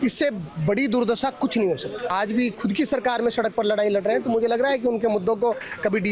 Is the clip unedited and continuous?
no; 1 cut; at 2.1 s

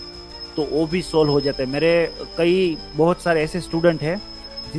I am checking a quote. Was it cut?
no; 0 cuts

